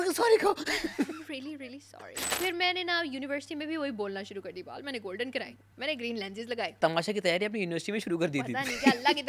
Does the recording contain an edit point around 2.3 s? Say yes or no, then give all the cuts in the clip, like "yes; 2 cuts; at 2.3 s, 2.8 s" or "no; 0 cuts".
yes; 3 cuts; at 2.3 s, 5.6 s, 6.8 s